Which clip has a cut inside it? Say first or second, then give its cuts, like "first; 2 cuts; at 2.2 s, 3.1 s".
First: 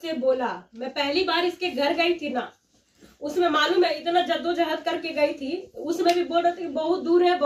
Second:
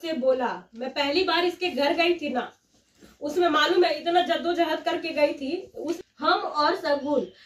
second; 1 cut; at 6.0 s